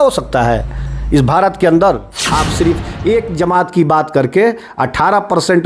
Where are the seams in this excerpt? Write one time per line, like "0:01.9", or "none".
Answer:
0:02.2